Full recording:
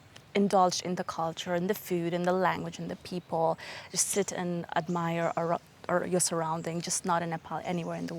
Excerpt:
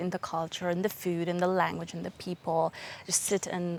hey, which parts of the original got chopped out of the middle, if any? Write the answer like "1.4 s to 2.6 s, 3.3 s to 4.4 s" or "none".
none